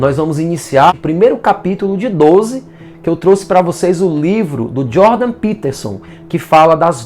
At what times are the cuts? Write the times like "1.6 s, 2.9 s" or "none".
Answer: 0.9 s